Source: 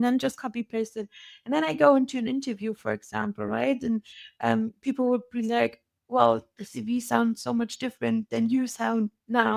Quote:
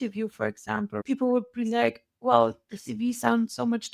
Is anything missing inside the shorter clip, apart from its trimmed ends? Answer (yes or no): yes